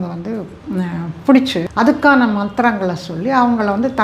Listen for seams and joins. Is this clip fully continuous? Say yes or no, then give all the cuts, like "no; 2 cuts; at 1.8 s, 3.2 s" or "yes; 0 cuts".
no; 1 cut; at 1.6 s